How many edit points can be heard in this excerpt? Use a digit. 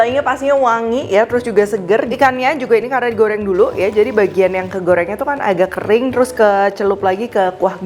1